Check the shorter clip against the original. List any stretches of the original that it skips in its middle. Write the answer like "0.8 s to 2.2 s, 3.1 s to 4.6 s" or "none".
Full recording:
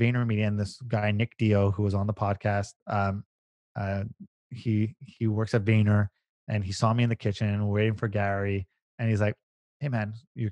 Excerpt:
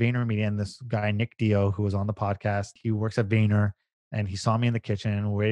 2.7 s to 5.1 s